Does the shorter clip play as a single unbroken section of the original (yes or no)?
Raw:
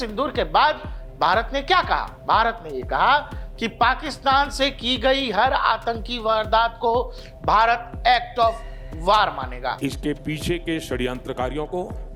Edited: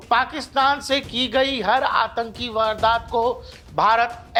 yes